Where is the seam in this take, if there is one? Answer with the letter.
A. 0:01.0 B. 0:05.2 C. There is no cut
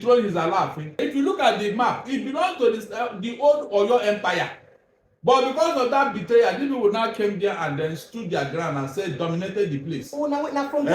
A